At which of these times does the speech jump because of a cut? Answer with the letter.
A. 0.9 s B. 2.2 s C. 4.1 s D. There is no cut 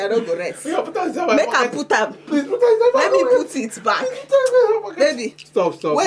D